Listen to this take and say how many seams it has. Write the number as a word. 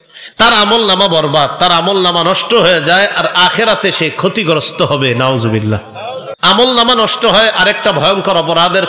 one